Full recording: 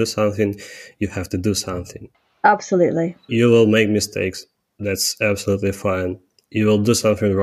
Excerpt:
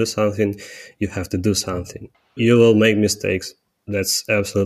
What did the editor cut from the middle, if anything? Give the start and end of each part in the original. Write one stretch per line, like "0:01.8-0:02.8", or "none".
0:02.3-0:03.2